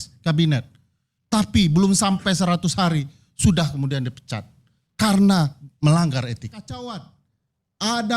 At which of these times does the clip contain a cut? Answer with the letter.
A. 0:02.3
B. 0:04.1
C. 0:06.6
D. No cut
C